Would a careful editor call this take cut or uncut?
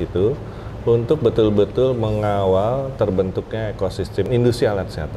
cut